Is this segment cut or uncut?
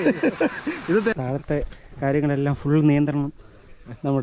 cut